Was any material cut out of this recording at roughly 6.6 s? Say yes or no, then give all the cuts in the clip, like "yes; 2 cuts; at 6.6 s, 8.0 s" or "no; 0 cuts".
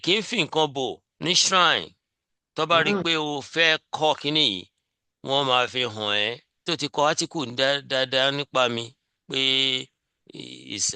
yes; 2 cuts; at 1.1 s, 6.6 s